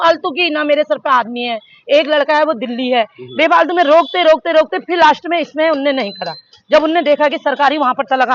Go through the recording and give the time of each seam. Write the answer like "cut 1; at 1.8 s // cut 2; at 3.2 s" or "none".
none